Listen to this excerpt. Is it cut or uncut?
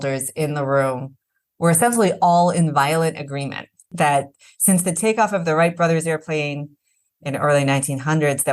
cut